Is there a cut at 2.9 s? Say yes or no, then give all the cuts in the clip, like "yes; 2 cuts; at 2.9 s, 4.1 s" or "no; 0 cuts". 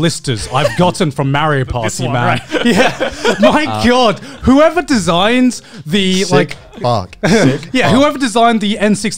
no; 0 cuts